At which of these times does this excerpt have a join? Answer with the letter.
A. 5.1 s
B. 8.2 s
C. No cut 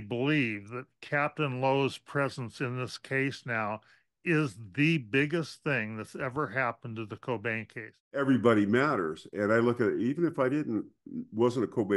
B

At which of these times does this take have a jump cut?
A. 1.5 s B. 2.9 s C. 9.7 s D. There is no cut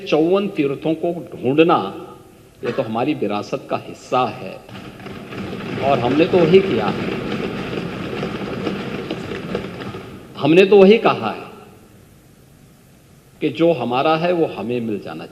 D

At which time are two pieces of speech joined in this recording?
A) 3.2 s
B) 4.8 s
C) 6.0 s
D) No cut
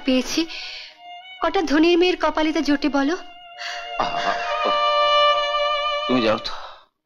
C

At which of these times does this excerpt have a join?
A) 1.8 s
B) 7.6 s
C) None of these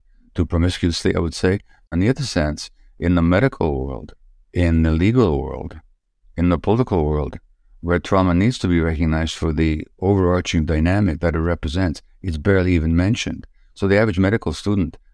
A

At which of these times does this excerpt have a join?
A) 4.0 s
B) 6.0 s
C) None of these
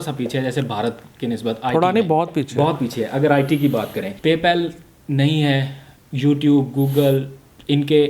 A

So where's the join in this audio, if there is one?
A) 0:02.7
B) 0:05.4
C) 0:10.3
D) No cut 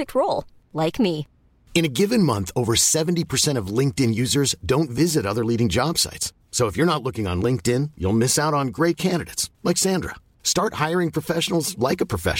D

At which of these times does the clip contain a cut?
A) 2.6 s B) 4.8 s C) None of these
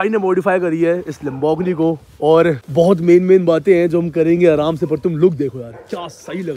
A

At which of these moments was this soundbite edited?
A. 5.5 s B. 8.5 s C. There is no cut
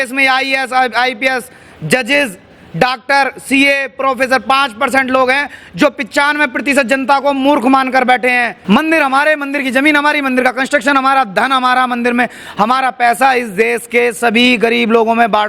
B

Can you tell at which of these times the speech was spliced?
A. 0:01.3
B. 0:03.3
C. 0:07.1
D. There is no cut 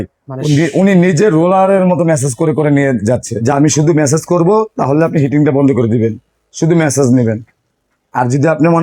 B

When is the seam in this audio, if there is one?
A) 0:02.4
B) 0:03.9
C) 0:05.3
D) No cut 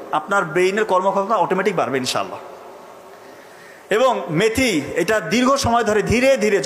D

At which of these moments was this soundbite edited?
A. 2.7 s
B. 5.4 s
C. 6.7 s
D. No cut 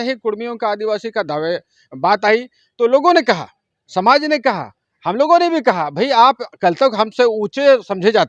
D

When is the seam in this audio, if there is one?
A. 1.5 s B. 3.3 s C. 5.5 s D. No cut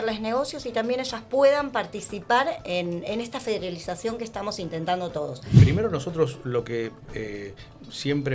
C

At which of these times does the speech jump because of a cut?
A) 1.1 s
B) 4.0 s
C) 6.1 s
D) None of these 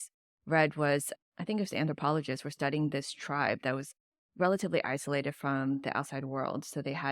A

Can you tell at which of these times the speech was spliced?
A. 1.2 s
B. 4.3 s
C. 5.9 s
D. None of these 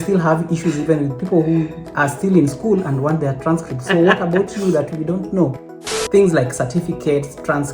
C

